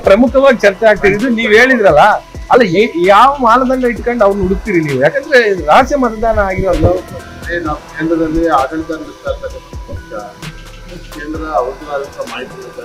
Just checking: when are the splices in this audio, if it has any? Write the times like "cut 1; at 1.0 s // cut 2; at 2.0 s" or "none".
none